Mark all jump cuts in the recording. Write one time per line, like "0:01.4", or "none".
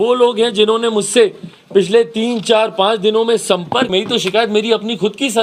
0:03.9